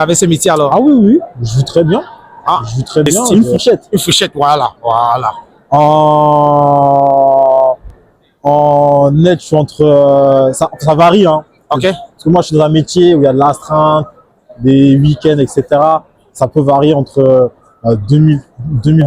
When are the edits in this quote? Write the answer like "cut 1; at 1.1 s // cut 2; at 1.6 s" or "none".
cut 1; at 3.3 s